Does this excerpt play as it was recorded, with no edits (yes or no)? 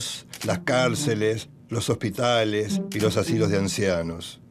no